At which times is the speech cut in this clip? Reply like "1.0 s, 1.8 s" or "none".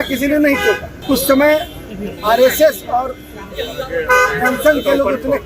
0.9 s